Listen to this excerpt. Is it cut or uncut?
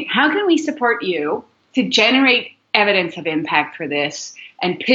uncut